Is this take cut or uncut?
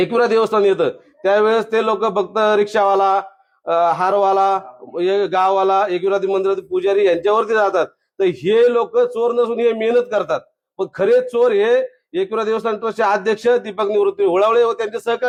uncut